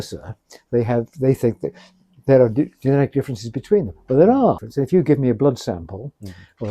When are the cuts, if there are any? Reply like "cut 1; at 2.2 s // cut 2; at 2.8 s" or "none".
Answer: cut 1; at 4.7 s